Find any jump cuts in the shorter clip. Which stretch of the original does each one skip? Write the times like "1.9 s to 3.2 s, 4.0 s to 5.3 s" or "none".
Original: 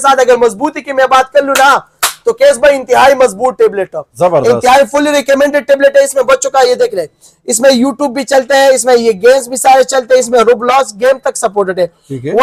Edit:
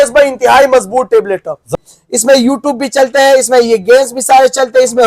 4.2 s to 7.0 s